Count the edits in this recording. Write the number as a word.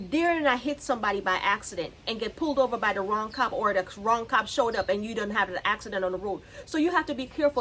zero